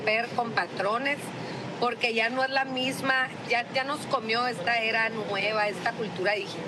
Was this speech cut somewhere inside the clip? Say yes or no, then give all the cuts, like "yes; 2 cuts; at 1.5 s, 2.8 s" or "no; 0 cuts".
no; 0 cuts